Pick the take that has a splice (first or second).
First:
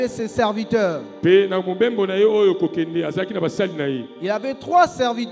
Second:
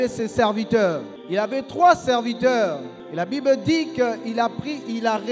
second